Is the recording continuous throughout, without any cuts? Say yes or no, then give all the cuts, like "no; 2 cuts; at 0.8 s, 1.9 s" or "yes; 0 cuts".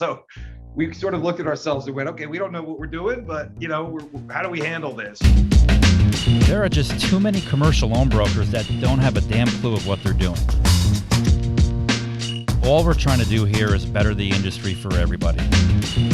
no; 1 cut; at 5.2 s